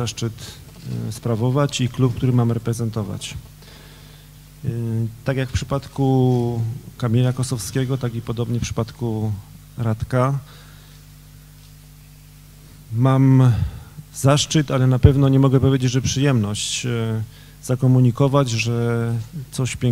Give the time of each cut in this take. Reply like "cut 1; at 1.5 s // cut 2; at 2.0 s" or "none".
none